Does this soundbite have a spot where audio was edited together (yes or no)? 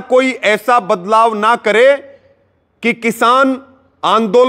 no